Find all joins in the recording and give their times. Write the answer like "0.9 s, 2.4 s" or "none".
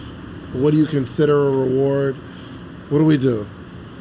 none